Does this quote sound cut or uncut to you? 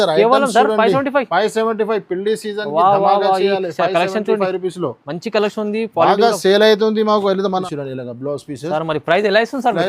cut